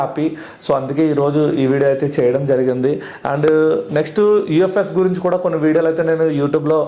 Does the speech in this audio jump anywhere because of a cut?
no; 0 cuts

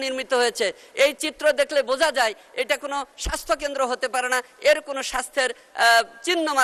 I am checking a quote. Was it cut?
no; 0 cuts

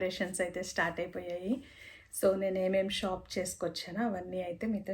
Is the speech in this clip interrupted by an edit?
no; 0 cuts

